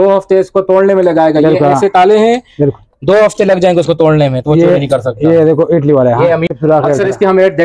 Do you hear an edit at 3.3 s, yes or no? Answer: no